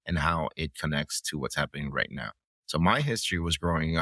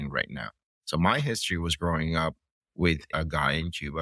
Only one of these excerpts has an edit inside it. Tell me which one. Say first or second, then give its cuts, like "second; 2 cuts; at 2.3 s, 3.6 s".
second; 1 cut; at 3.1 s